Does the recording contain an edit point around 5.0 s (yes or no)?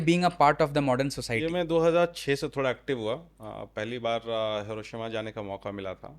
no